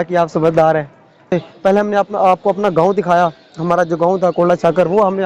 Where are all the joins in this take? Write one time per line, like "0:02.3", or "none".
0:01.3